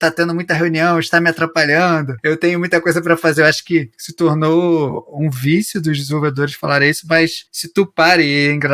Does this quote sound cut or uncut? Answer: uncut